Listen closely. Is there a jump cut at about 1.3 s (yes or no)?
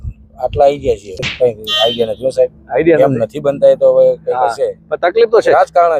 yes